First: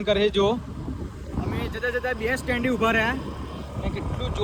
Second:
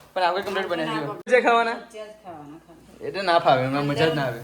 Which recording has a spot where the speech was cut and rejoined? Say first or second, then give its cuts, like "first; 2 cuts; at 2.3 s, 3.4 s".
second; 1 cut; at 1.3 s